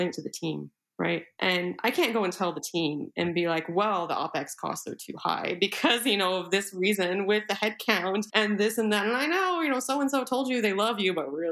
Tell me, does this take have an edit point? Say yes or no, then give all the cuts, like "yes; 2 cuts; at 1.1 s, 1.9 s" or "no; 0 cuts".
no; 0 cuts